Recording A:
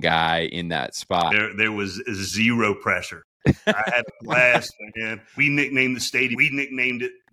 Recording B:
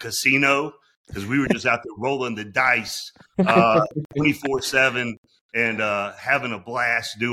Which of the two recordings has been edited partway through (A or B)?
A